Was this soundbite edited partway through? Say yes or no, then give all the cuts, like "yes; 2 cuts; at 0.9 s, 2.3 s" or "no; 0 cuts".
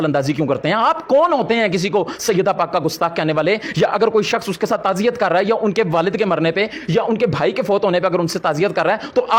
no; 0 cuts